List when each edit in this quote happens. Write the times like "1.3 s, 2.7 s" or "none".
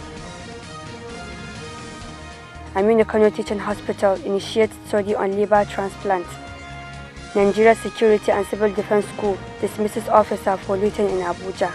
2.5 s

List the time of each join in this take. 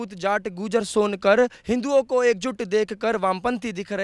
none

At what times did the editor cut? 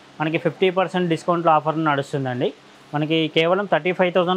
none

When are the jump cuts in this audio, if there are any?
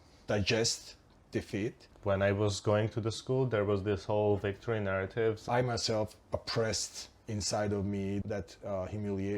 1.9 s, 5.5 s, 8.2 s

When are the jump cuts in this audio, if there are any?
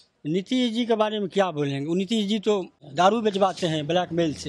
2.8 s

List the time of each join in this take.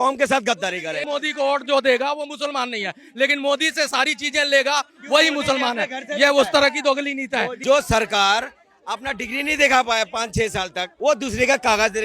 1.0 s, 7.5 s, 10.8 s

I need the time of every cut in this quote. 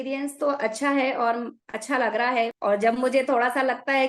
2.5 s

